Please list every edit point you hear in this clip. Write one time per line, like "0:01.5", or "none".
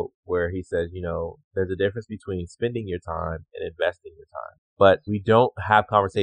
0:04.8